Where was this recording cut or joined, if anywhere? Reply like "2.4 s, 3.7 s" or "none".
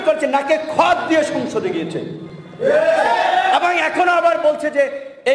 none